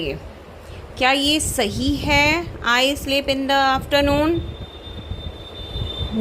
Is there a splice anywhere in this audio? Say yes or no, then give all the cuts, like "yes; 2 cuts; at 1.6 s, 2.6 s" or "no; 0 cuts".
no; 0 cuts